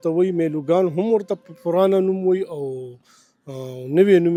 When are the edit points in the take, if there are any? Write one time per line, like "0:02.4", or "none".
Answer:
none